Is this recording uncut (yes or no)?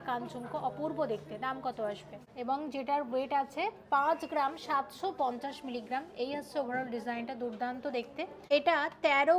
no